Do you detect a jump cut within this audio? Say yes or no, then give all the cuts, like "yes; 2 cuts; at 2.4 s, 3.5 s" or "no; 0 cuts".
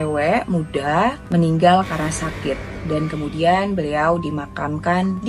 no; 0 cuts